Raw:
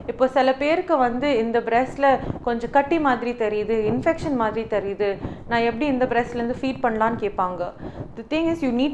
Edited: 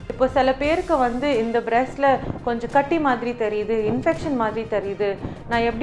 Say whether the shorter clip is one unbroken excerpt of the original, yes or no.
yes